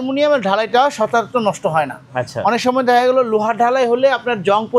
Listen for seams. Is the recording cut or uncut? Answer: uncut